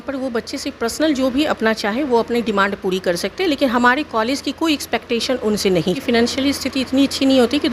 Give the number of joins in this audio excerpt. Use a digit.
1